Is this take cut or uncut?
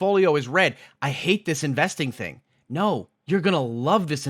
cut